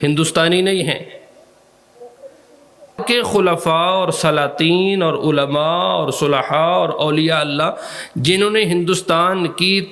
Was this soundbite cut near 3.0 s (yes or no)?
yes